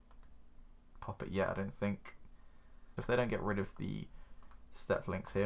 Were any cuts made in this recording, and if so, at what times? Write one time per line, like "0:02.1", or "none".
0:02.9